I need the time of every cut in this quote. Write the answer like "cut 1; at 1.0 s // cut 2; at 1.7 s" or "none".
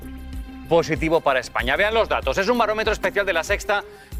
none